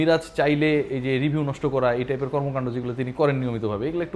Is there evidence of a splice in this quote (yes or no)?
no